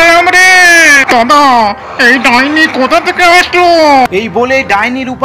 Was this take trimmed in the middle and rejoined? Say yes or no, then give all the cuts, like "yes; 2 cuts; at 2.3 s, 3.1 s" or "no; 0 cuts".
yes; 1 cut; at 4.1 s